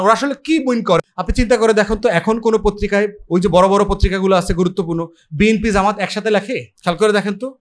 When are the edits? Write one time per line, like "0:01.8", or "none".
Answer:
0:01.0
0:06.7